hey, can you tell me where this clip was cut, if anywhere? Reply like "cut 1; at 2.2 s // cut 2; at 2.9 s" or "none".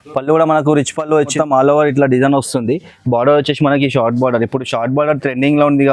cut 1; at 1.3 s